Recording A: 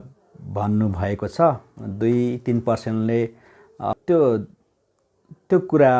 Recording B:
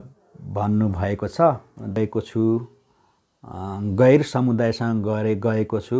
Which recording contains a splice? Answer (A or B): B